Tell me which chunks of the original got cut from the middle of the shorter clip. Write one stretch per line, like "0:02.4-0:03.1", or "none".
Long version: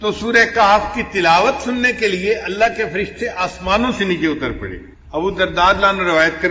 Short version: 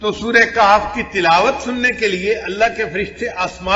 none